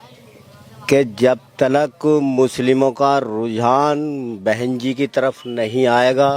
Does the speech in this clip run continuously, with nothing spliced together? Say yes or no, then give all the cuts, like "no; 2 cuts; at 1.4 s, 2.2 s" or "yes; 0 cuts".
yes; 0 cuts